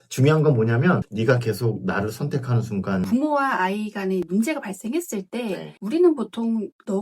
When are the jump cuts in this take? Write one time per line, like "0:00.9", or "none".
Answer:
0:01.1
0:03.1
0:04.3